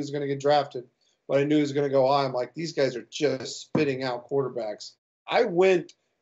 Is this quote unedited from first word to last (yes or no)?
no